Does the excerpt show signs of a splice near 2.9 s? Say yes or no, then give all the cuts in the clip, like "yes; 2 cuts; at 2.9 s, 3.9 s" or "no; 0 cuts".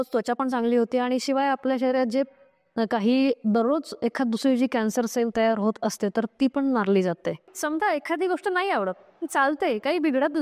no; 1 cut; at 7.5 s